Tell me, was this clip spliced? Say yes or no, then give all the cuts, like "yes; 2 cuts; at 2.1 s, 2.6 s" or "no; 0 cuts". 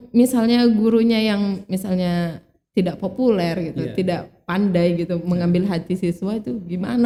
no; 0 cuts